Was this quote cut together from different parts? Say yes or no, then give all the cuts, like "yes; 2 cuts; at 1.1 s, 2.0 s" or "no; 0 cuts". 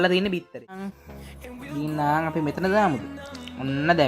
yes; 1 cut; at 1.0 s